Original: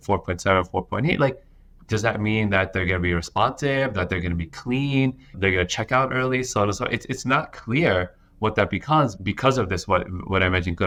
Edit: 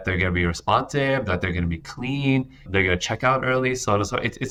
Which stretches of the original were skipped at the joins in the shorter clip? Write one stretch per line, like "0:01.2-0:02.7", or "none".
none